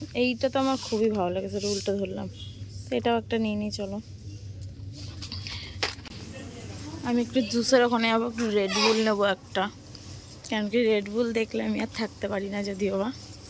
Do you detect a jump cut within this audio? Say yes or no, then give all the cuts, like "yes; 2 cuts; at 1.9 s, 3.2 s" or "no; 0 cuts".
yes; 1 cut; at 6.1 s